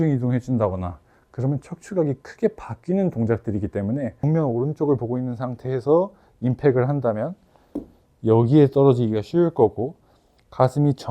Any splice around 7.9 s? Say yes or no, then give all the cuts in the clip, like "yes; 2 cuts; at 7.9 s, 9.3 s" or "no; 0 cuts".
no; 1 cut; at 4.1 s